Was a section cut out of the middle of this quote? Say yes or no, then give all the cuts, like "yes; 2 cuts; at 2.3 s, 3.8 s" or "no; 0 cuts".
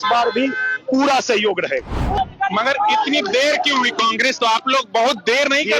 yes; 1 cut; at 2.2 s